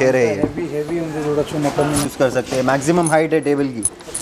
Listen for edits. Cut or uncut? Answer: cut